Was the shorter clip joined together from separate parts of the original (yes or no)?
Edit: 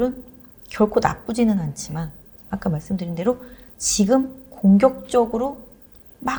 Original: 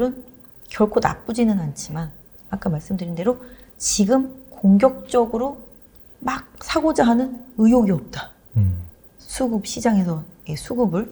no